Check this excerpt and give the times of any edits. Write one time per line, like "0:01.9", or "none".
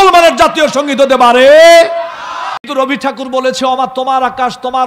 0:02.7